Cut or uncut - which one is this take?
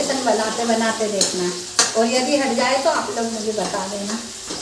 uncut